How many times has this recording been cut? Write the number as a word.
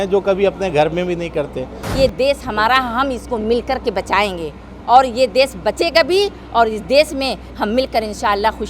one